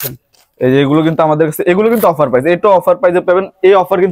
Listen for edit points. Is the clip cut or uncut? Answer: uncut